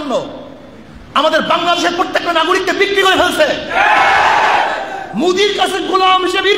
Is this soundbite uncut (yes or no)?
yes